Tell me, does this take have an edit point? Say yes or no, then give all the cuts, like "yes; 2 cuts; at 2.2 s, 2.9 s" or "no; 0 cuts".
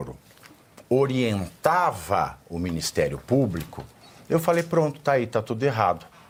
no; 0 cuts